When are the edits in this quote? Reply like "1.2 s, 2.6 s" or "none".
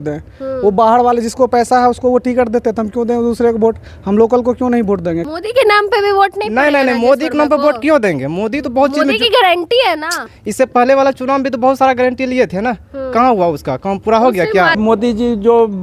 5.2 s, 10.3 s, 14.8 s